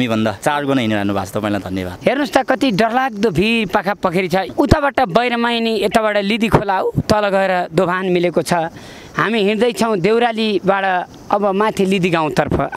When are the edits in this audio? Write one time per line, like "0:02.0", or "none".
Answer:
0:01.9